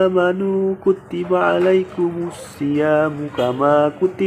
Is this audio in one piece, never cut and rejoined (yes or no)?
yes